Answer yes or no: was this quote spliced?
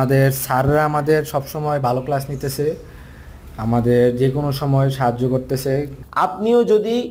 yes